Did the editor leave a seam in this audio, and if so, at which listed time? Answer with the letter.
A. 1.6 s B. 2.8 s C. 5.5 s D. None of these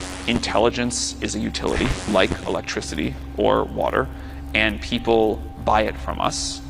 C